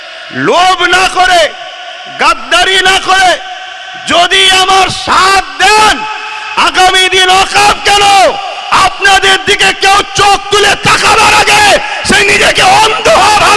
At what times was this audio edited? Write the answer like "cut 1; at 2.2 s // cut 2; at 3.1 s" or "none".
none